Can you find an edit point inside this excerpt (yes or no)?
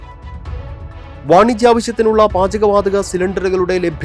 no